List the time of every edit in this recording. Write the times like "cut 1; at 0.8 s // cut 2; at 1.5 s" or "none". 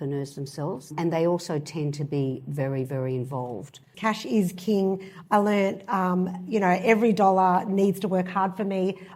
cut 1; at 0.9 s // cut 2; at 3.9 s